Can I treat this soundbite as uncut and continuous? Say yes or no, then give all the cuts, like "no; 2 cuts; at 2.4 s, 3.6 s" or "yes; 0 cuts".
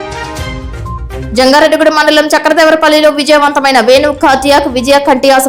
yes; 0 cuts